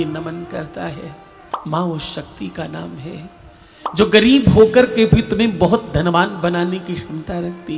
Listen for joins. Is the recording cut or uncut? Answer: cut